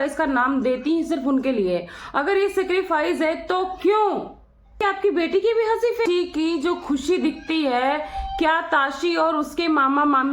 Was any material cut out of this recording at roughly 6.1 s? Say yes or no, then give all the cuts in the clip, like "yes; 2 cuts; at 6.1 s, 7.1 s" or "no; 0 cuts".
yes; 2 cuts; at 4.8 s, 6.1 s